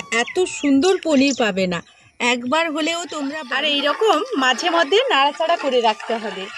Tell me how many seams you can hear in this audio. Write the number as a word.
one